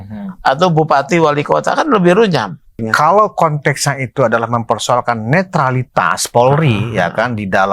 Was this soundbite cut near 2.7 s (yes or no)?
yes